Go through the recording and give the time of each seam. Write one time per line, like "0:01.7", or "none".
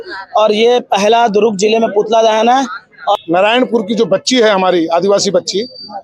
0:03.2